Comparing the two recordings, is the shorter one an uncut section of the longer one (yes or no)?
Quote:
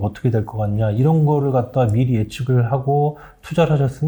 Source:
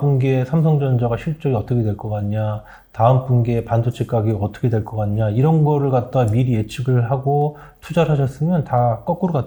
yes